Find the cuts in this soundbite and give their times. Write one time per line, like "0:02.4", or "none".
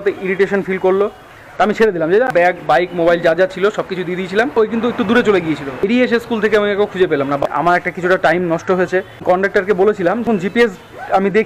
0:02.3
0:04.6
0:05.8
0:07.4
0:10.2